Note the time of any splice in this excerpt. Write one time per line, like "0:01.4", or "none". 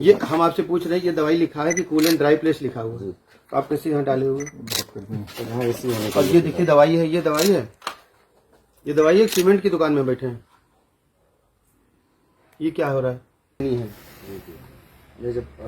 0:13.6